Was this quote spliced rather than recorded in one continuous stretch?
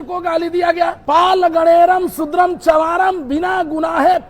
yes; 1 cut; at 1.0 s

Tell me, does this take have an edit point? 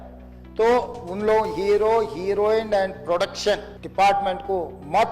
yes; 1 cut; at 3.8 s

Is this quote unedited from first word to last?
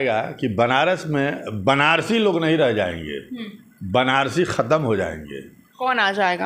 yes; 0 cuts

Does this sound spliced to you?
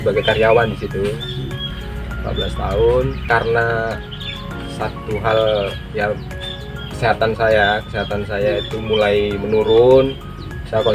yes; 2 cuts; at 1.7 s, 3.2 s

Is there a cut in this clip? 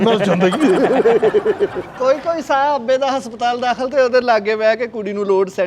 yes; 1 cut; at 1.8 s

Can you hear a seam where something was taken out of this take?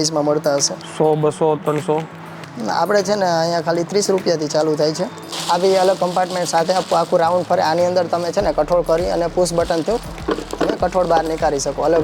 yes; 1 cut; at 5.1 s

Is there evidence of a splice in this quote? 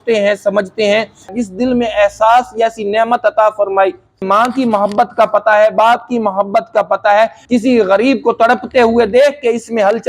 yes; 3 cuts; at 1.3 s, 4.2 s, 7.4 s

